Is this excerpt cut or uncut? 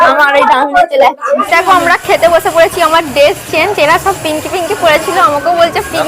cut